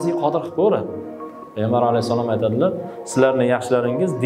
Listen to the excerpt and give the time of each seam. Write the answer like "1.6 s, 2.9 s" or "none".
1.4 s